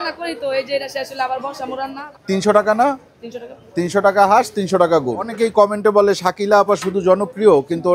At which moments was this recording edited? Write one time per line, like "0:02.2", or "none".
0:02.0
0:05.3